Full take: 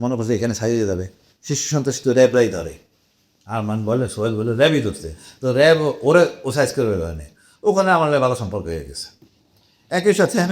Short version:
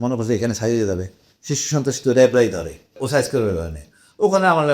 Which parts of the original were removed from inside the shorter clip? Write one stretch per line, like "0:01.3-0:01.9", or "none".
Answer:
0:02.9-0:06.4